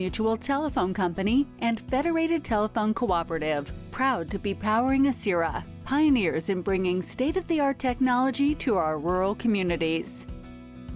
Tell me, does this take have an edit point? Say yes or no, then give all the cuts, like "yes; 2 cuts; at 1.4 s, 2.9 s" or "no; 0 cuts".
yes; 1 cut; at 10.1 s